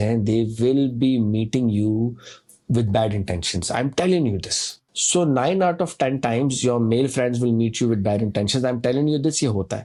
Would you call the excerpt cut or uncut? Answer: uncut